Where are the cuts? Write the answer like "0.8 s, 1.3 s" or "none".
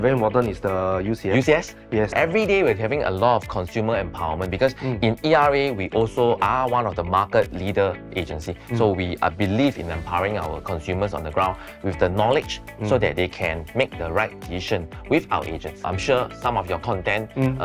15.9 s